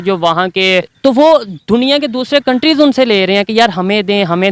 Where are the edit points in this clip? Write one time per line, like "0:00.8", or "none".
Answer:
0:00.9

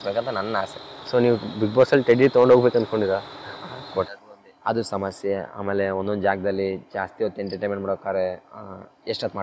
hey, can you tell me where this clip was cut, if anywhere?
0:04.1

